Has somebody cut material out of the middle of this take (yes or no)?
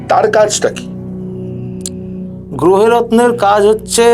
no